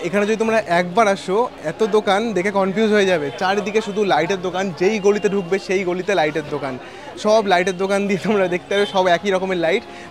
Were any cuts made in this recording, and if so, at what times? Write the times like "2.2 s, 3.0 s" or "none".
none